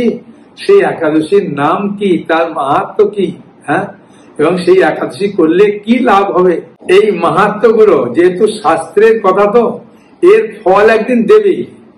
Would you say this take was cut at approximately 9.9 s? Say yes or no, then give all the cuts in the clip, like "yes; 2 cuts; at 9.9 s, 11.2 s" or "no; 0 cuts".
no; 1 cut; at 6.7 s